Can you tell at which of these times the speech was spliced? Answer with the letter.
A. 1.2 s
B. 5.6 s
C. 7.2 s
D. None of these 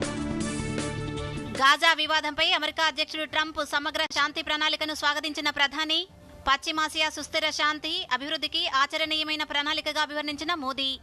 A